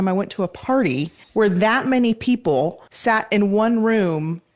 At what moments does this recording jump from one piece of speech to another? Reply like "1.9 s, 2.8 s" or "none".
1.2 s, 2.9 s